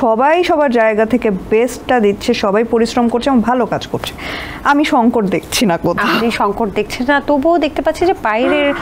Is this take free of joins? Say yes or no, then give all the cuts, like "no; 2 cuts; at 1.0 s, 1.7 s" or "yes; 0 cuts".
yes; 0 cuts